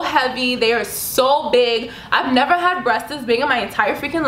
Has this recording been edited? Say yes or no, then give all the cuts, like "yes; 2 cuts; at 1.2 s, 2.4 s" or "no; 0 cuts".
no; 0 cuts